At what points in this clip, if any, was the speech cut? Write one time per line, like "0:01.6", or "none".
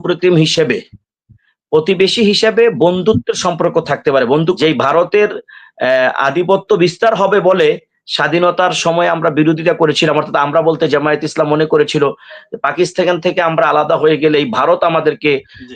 0:04.6